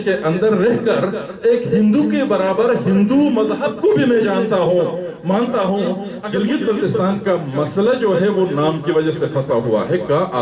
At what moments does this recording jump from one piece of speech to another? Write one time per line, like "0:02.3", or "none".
0:06.1